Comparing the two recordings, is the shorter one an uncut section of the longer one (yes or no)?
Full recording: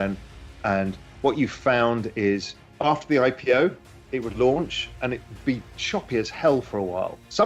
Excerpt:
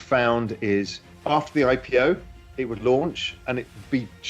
yes